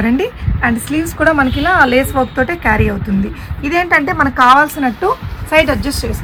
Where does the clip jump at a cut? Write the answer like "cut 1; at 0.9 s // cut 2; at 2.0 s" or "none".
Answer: none